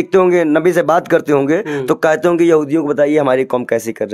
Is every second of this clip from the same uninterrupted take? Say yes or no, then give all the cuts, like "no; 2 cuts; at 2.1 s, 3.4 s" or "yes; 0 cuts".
yes; 0 cuts